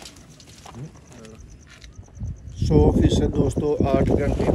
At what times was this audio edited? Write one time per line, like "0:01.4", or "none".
none